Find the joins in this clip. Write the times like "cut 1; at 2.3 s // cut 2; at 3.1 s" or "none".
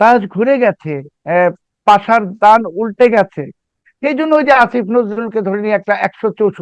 cut 1; at 1.1 s

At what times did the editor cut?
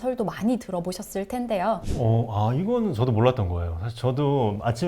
cut 1; at 1.9 s

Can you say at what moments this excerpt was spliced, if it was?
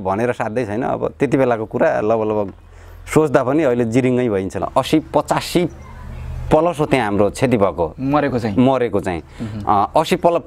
cut 1; at 4.6 s

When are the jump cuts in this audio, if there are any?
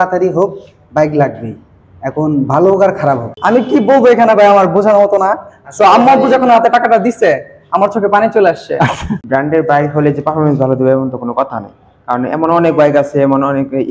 cut 1; at 3.3 s // cut 2; at 9.2 s

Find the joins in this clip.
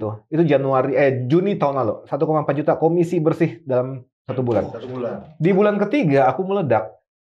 none

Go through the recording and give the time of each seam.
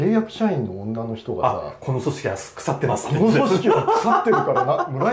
none

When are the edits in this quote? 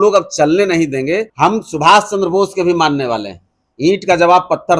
cut 1; at 1.3 s

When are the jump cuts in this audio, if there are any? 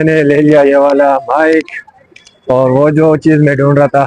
none

